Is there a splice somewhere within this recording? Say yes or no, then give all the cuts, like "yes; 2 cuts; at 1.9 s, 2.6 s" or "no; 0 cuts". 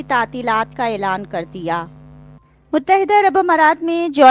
yes; 1 cut; at 2.5 s